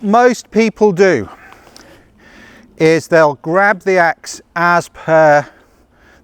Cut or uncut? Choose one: uncut